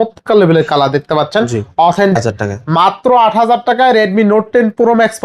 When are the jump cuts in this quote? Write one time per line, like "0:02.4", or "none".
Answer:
0:02.2